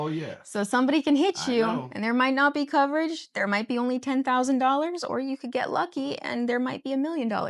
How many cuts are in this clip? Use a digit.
0